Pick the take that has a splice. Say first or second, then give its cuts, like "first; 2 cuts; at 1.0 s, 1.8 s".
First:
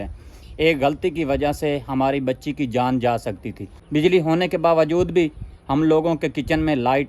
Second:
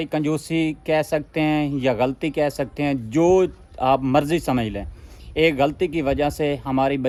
first; 1 cut; at 3.8 s